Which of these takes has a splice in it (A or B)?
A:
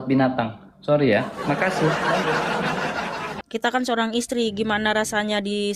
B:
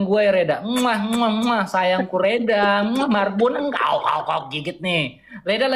A